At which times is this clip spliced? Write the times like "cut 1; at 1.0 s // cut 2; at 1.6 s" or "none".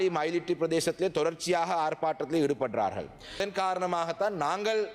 cut 1; at 3.4 s